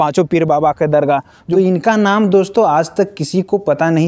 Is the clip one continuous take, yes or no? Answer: no